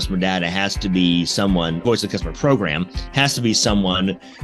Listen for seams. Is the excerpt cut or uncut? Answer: cut